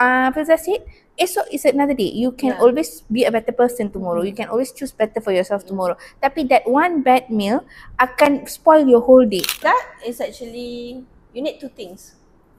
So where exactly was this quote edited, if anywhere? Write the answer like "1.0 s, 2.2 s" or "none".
9.5 s